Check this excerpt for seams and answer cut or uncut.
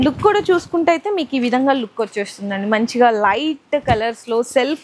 uncut